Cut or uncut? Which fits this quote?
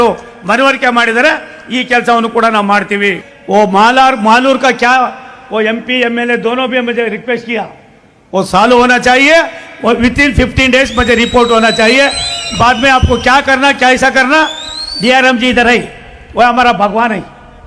cut